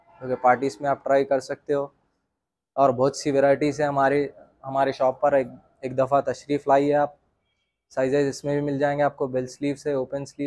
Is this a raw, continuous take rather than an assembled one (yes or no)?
yes